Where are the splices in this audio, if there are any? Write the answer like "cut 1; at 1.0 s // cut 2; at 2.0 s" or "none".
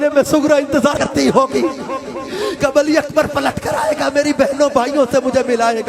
cut 1; at 0.9 s